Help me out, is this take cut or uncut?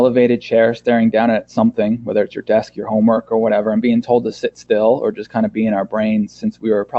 uncut